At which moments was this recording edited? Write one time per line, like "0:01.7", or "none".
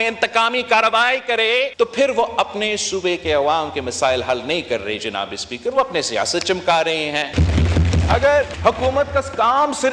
0:01.7
0:07.3
0:08.5